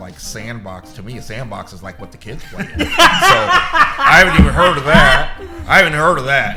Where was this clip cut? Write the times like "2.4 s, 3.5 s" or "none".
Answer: none